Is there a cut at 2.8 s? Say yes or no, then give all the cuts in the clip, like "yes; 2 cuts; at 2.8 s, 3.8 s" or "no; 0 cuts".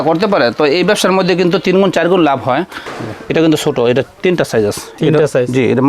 yes; 1 cut; at 2.8 s